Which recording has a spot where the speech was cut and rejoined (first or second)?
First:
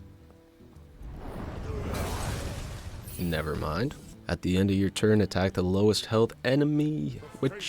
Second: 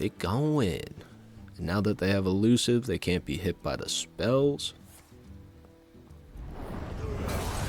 first